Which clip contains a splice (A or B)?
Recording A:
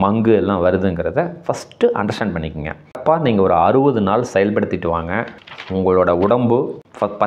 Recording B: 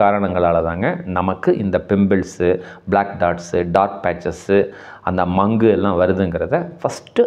A